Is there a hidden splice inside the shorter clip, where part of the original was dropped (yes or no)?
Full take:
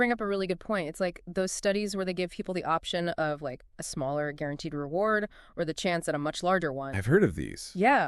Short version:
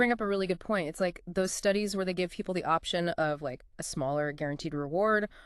no